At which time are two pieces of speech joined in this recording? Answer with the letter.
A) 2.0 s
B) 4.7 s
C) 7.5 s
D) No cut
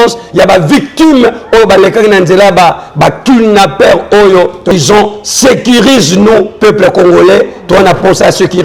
B